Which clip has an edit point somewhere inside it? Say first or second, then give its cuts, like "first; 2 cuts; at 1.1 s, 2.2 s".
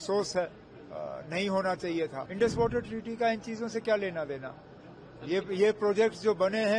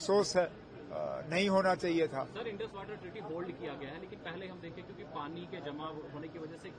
first; 1 cut; at 2.2 s